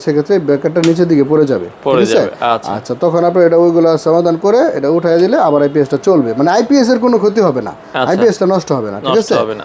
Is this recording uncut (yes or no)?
yes